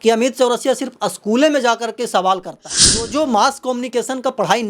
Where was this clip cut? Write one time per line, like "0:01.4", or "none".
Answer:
0:03.1